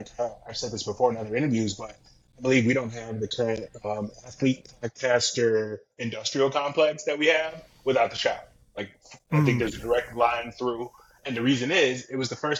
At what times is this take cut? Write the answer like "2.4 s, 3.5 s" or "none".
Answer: none